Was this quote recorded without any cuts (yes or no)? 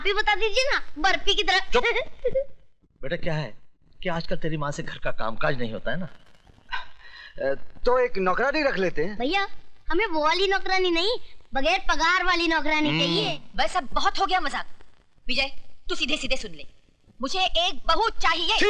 yes